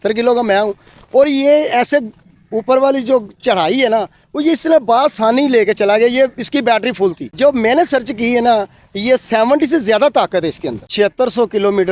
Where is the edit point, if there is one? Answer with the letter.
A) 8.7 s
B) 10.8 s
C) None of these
B